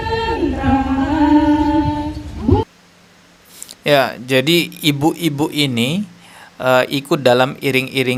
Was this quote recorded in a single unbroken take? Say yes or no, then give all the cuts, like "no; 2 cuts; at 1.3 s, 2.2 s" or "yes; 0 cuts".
yes; 0 cuts